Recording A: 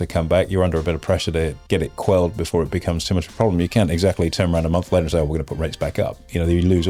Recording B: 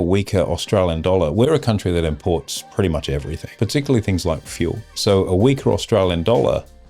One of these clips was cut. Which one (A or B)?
B